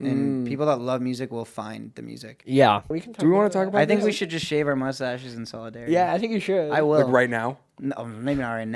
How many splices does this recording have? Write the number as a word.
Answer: one